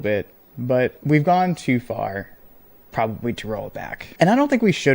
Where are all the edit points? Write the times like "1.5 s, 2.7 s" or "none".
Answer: 1.0 s, 4.0 s